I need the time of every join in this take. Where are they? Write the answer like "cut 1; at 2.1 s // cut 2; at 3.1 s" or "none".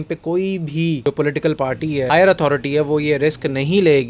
cut 1; at 1.0 s // cut 2; at 2.1 s